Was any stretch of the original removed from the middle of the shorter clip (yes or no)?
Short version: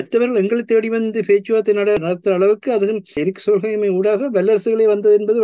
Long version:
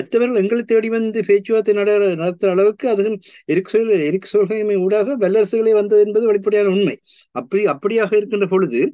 yes